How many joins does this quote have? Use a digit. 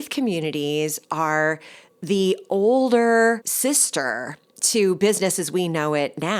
1